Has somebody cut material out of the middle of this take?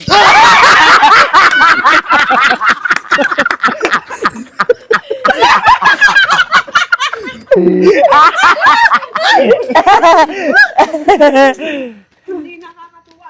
yes; 1 cut; at 1.1 s

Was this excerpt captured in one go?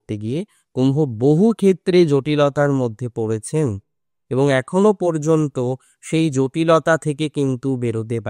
yes; 0 cuts

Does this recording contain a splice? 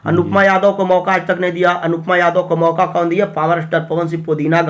no; 0 cuts

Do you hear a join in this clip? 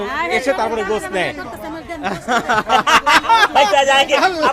no; 0 cuts

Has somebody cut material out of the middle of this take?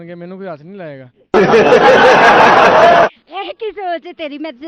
no; 0 cuts

